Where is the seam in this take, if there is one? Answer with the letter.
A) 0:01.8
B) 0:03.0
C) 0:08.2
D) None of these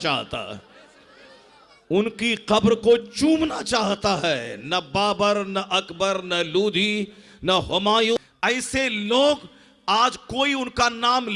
C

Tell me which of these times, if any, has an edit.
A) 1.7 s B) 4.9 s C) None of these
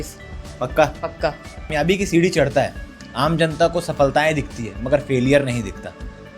A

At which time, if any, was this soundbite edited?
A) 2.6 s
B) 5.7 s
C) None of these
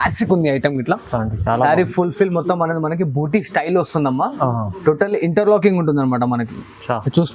C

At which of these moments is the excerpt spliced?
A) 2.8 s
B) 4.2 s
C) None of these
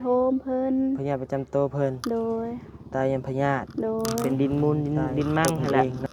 B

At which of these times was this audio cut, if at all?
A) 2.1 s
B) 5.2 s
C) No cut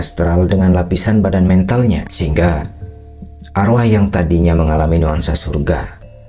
A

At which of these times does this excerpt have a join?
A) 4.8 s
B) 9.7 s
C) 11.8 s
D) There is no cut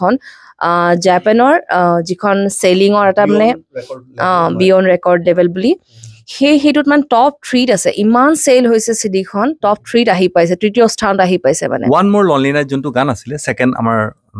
C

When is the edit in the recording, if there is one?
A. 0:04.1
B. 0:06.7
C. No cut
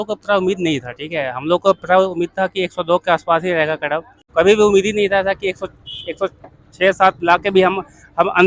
A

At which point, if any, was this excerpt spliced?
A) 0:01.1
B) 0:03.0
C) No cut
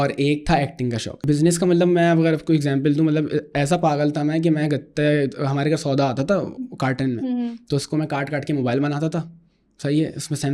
A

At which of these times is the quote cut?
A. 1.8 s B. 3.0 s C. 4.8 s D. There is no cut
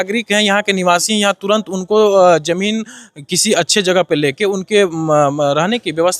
D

